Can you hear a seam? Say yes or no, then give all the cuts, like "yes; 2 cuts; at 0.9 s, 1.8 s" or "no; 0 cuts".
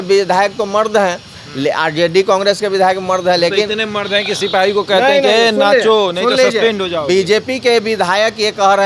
no; 0 cuts